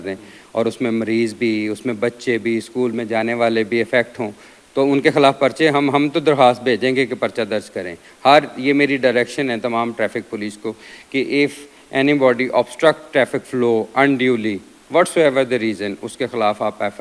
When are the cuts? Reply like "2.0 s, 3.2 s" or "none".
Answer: none